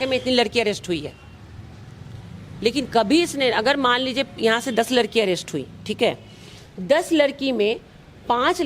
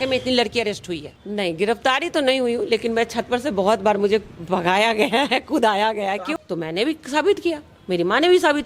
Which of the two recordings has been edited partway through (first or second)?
second